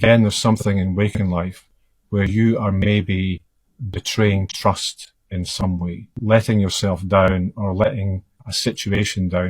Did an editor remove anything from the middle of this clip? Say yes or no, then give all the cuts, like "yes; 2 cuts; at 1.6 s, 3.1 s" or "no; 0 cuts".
yes; 1 cut; at 6.2 s